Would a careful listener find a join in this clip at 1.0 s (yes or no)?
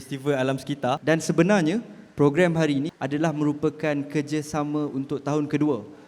yes